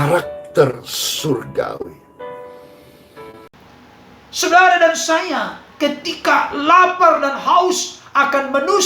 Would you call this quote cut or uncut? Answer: cut